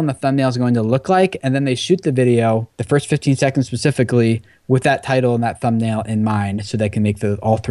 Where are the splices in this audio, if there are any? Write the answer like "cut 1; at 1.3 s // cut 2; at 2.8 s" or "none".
cut 1; at 2.7 s